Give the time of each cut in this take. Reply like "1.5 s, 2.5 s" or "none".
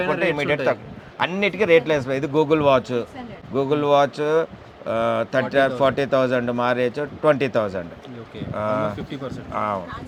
none